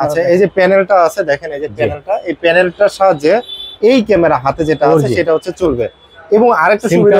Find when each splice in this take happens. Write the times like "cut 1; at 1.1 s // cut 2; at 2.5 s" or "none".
none

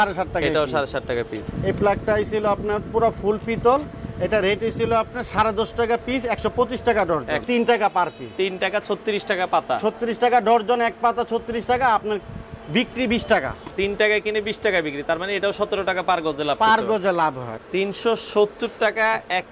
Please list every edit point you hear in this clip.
cut 1; at 1.4 s // cut 2; at 7.4 s // cut 3; at 13.7 s // cut 4; at 17.5 s

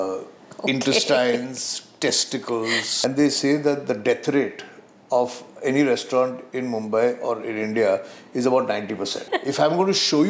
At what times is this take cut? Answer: cut 1; at 2.9 s // cut 2; at 9.3 s

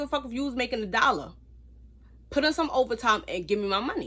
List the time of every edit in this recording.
none

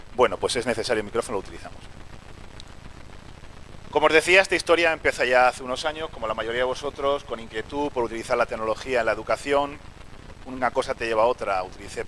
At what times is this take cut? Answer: cut 1; at 6.5 s

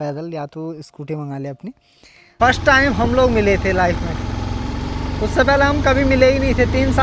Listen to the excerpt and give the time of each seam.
cut 1; at 2.4 s

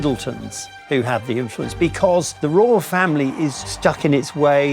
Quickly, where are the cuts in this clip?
cut 1; at 2.3 s // cut 2; at 3.7 s

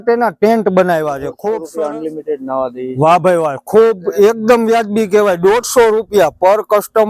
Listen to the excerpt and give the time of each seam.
cut 1; at 1.6 s

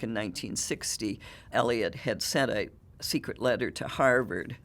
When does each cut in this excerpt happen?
cut 1; at 1.5 s

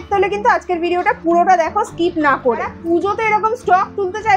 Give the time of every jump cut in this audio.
cut 1; at 2.7 s

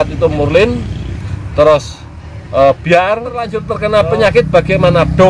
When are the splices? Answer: cut 1; at 3.6 s

